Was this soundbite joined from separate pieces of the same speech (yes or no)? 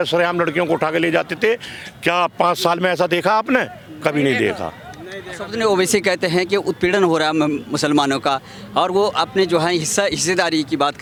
no